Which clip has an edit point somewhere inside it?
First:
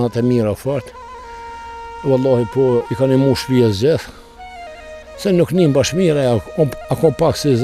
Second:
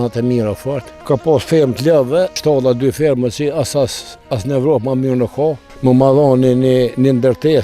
second; 3 cuts; at 0.9 s, 2.4 s, 5.7 s

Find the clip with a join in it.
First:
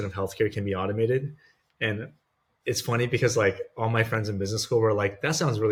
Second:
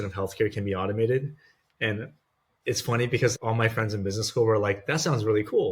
second; 1 cut; at 3.3 s

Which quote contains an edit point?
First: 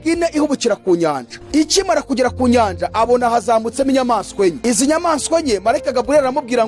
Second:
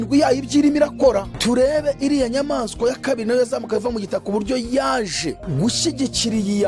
first; 2 cuts; at 1.3 s, 4.6 s

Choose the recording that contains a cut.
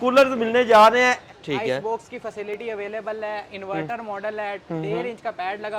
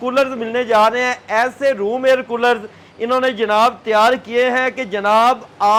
first; 1 cut; at 1.2 s

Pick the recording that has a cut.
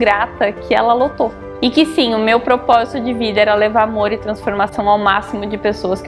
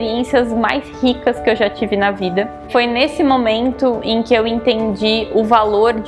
first; 1 cut; at 1.4 s

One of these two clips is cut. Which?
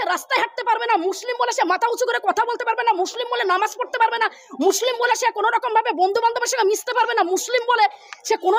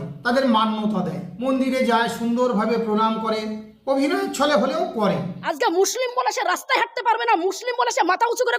second; 1 cut; at 5.3 s

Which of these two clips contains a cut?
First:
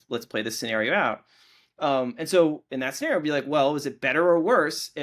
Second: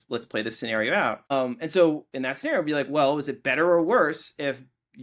second; 1 cut; at 1.3 s

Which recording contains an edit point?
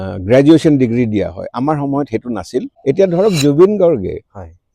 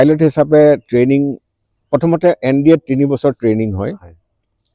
first; 1 cut; at 2.7 s

